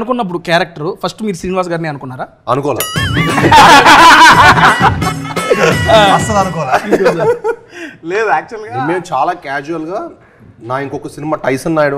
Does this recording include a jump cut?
no; 0 cuts

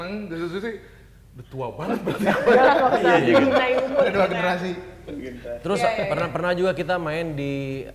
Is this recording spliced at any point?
no; 0 cuts

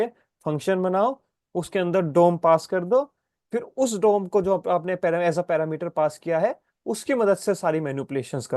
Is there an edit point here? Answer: no; 0 cuts

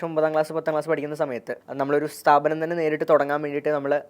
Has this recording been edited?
yes; 1 cut; at 1.6 s

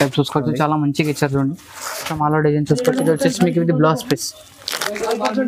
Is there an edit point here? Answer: yes; 1 cut; at 2.1 s

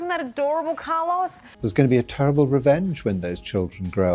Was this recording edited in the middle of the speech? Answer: yes; 1 cut; at 1.4 s

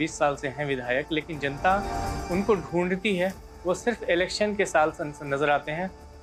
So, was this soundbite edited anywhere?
no; 0 cuts

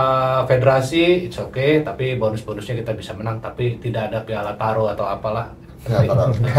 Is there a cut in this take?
no; 0 cuts

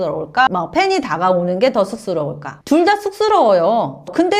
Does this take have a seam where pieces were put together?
no; 0 cuts

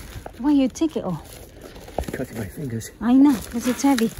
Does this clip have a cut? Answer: no; 0 cuts

